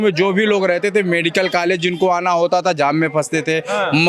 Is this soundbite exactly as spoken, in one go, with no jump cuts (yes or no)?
yes